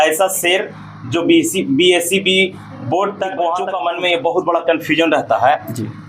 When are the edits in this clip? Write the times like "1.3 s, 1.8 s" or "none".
3.7 s